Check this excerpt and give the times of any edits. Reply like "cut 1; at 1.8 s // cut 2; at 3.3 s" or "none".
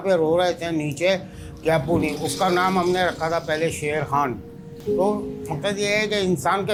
none